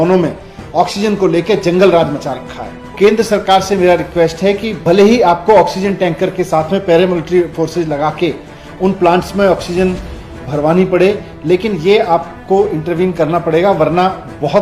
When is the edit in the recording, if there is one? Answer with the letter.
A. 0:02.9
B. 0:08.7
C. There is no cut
A